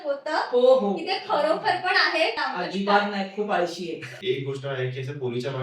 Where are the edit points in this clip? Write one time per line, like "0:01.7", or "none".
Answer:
0:02.4
0:04.1